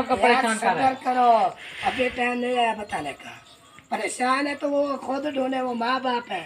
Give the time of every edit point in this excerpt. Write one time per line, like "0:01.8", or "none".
none